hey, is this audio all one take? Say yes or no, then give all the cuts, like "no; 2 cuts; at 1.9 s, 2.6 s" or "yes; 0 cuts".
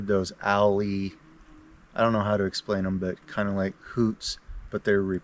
yes; 0 cuts